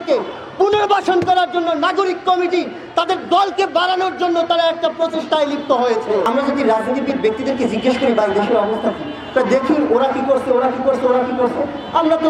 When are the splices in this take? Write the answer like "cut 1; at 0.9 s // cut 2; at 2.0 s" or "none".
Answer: cut 1; at 6.2 s